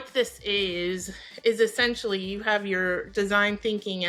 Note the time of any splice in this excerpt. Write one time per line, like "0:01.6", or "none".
none